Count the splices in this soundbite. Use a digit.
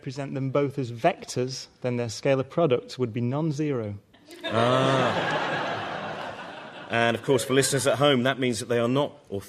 1